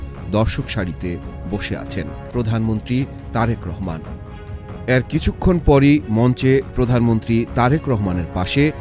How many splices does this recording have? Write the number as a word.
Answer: one